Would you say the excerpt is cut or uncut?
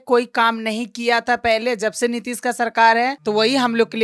uncut